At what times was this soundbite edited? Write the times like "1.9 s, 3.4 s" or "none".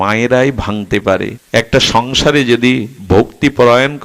1.4 s